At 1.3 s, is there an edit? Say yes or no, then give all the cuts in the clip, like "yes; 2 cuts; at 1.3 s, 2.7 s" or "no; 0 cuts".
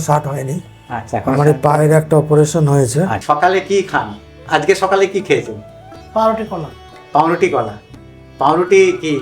no; 1 cut; at 3.2 s